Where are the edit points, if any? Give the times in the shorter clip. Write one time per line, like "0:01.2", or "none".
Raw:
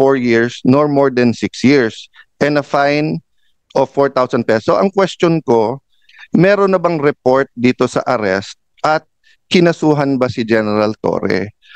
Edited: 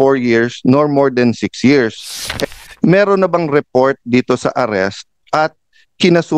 0:02.3